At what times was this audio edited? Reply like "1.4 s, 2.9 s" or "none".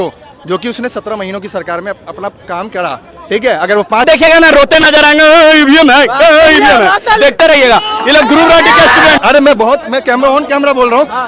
4.1 s, 9.2 s